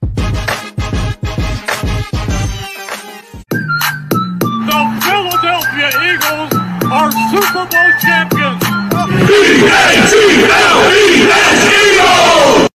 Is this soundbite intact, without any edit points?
no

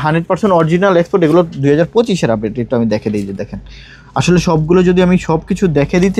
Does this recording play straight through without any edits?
yes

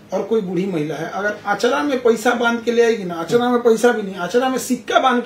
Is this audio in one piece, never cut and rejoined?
yes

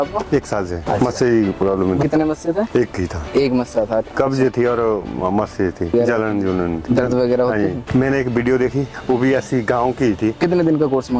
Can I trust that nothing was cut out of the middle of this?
no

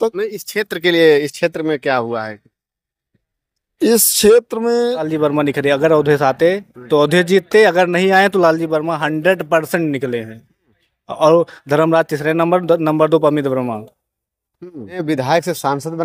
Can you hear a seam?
yes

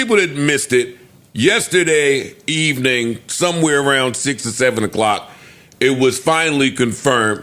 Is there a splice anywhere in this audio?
no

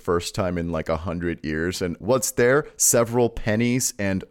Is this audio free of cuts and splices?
no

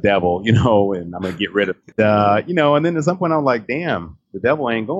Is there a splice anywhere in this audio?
yes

